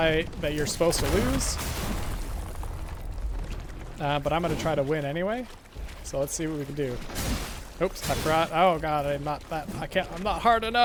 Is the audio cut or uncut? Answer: uncut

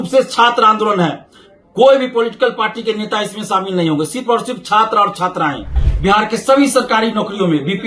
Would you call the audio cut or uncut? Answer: cut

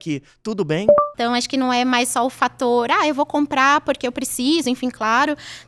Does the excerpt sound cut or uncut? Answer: cut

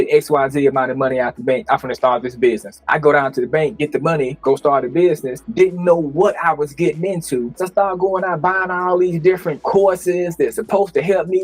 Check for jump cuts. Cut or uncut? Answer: cut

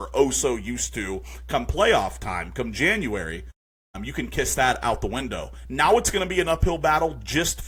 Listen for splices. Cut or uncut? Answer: uncut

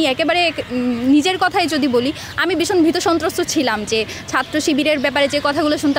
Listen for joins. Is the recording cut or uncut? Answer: uncut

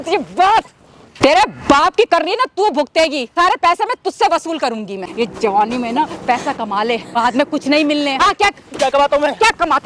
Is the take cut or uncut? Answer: cut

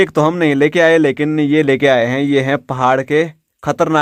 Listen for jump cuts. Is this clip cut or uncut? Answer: uncut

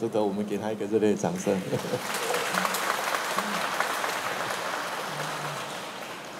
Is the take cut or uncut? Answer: uncut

